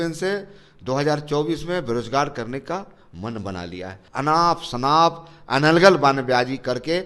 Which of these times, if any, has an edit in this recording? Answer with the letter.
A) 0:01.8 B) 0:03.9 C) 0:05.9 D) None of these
B